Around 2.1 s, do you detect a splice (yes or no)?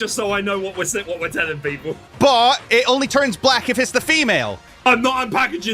yes